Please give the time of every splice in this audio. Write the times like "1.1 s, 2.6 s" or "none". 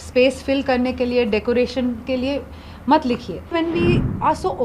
3.5 s